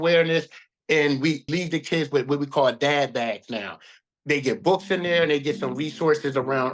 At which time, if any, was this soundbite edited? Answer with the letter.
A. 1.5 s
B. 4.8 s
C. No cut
A